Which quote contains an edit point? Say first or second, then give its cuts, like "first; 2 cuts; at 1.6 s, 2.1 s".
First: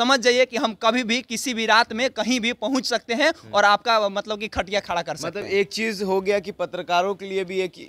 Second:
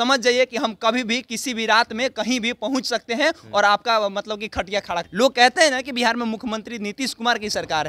second; 1 cut; at 5.1 s